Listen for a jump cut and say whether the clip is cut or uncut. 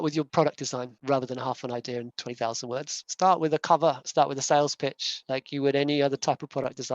cut